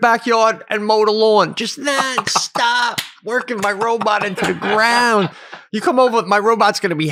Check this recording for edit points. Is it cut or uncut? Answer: uncut